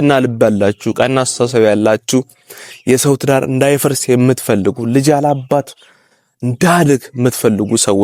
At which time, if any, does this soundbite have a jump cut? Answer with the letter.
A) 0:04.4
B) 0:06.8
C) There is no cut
C